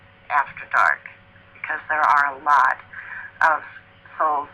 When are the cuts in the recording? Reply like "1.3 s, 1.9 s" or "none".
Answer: 2.6 s